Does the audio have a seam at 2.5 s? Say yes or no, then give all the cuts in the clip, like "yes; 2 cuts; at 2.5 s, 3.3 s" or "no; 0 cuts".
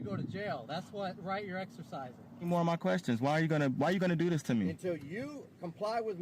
yes; 1 cut; at 2.5 s